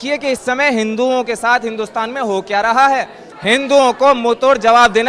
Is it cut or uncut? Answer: cut